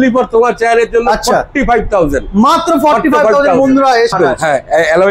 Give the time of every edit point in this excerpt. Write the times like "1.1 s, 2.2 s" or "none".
4.1 s